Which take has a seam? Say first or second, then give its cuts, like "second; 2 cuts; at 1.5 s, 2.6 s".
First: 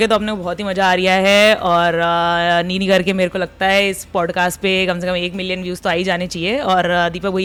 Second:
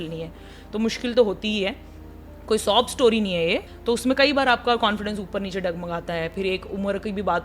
second; 1 cut; at 3.7 s